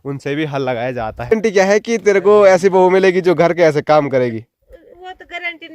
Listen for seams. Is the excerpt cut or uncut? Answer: cut